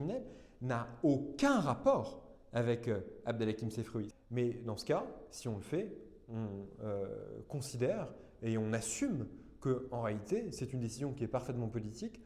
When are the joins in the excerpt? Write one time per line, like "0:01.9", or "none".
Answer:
0:04.1